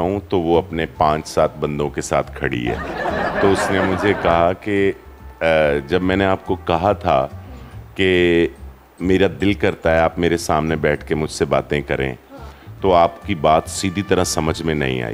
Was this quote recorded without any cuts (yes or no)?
yes